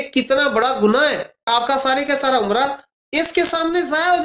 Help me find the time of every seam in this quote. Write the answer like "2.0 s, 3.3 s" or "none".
1.5 s, 2.8 s